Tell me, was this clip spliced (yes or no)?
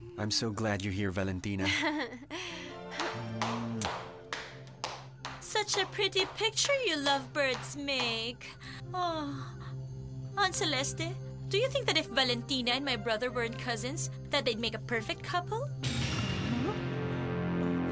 yes